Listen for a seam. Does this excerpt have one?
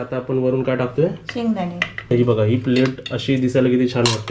yes; 1 cut; at 2.0 s

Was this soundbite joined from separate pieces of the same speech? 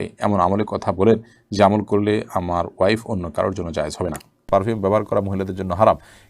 yes; 1 cut; at 4.4 s

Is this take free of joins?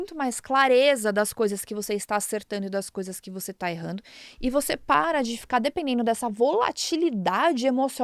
yes; 0 cuts

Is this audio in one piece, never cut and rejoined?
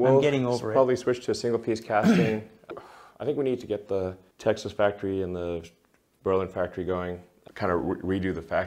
no; 2 cuts; at 4.2 s, 7.3 s

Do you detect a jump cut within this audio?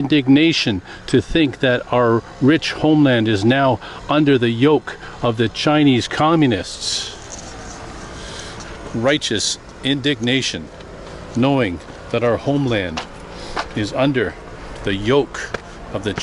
no; 0 cuts

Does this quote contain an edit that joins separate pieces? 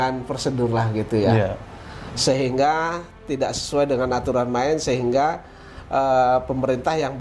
no; 0 cuts

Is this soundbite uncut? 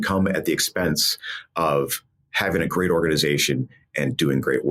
yes; 0 cuts

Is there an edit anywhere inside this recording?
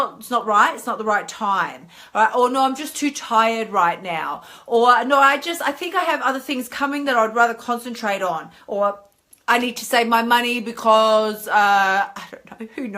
no; 0 cuts

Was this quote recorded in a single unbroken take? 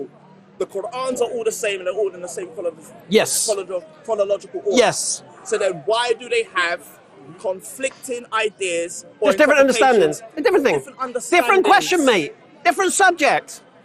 yes; 0 cuts

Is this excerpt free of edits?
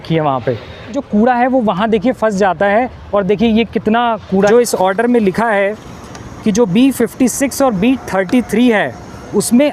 no; 2 cuts; at 1.0 s, 4.5 s

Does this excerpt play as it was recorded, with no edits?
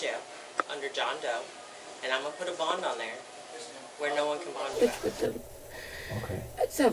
no; 1 cut; at 4.7 s

